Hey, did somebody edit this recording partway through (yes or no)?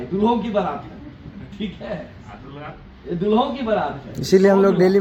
no